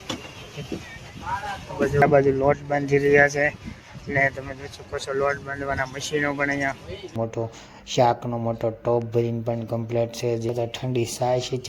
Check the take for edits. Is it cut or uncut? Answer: cut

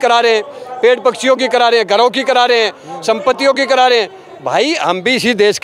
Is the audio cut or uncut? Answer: uncut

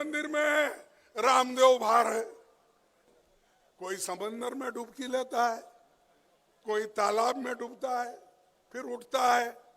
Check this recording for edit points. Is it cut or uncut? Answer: cut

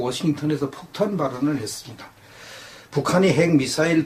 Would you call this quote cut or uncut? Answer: uncut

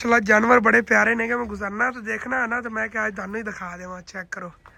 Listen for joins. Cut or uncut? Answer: uncut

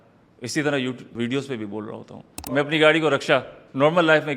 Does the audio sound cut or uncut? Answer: cut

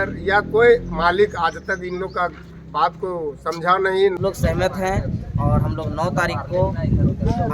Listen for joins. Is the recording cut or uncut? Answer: cut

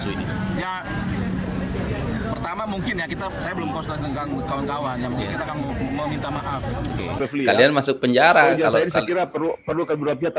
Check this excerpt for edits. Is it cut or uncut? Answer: cut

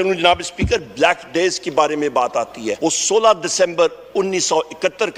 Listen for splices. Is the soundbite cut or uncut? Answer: cut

